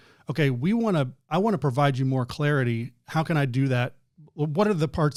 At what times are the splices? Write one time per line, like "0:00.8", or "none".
none